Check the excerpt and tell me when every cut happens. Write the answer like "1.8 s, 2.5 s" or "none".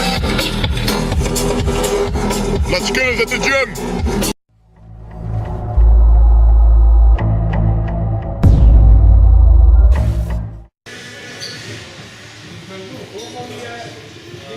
3.1 s